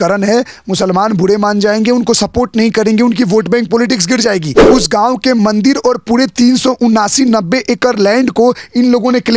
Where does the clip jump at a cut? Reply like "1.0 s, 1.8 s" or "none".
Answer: 4.5 s